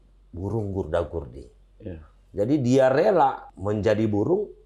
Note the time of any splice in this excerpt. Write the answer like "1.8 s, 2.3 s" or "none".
3.5 s